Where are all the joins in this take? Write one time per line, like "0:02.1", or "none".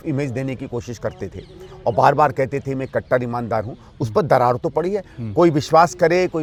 none